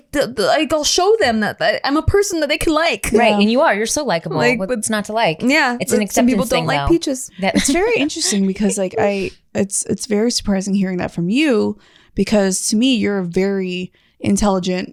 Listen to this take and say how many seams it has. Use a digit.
0